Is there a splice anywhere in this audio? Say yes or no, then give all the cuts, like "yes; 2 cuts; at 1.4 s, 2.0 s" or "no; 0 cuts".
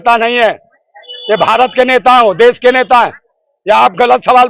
no; 0 cuts